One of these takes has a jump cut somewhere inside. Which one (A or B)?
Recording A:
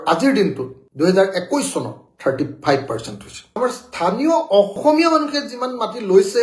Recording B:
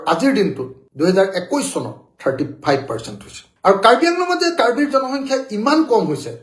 A